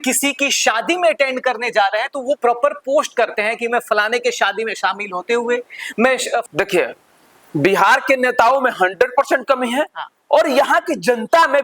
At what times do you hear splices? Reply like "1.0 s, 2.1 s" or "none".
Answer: 6.4 s